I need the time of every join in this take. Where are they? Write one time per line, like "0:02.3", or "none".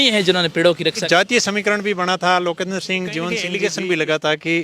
0:01.0
0:03.5